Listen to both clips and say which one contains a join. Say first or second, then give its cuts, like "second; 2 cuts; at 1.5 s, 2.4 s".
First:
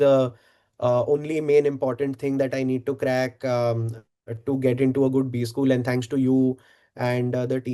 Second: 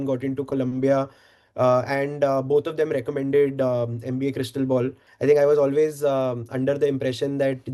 second; 1 cut; at 5.0 s